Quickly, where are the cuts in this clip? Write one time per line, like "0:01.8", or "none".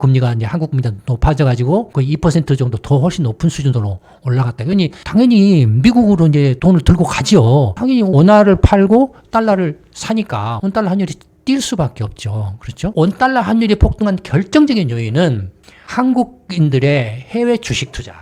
0:08.1
0:12.8